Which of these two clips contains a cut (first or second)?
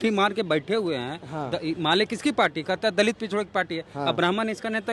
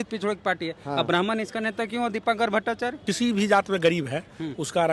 second